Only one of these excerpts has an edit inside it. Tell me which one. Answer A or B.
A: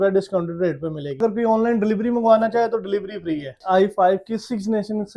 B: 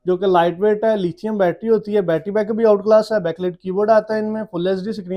A